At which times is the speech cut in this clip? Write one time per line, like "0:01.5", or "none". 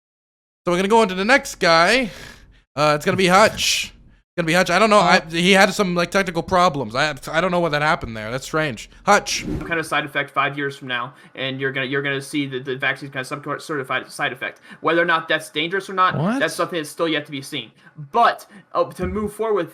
0:09.6